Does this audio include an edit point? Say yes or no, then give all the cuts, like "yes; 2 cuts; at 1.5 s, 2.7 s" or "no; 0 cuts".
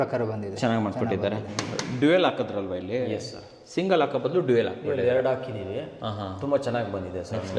yes; 1 cut; at 1.5 s